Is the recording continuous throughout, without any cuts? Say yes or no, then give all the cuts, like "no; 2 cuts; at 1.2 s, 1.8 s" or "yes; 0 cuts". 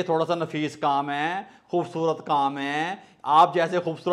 yes; 0 cuts